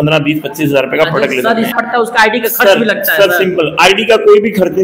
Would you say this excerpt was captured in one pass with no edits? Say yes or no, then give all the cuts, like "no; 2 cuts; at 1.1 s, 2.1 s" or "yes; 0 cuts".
no; 1 cut; at 1.7 s